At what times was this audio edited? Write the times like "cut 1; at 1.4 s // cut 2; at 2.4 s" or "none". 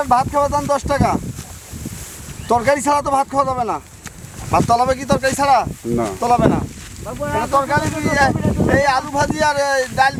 none